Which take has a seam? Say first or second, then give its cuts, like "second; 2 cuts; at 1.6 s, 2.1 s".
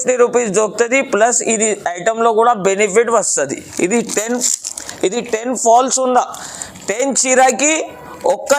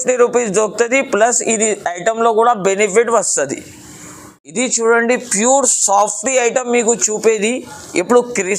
first; 1 cut; at 3.7 s